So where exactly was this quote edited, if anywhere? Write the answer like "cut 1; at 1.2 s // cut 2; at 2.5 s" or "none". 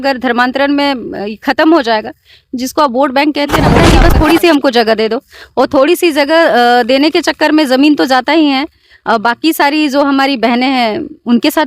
cut 1; at 3.8 s